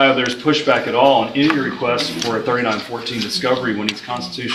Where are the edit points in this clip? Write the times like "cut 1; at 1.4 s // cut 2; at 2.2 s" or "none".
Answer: none